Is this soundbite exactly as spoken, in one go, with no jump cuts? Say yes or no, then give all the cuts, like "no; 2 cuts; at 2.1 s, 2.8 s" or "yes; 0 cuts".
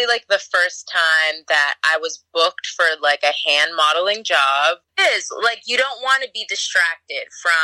no; 1 cut; at 4.9 s